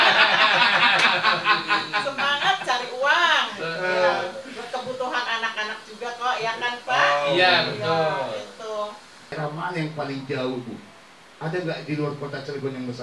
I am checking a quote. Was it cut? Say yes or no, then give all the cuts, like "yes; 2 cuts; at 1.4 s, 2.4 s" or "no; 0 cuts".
yes; 1 cut; at 9.3 s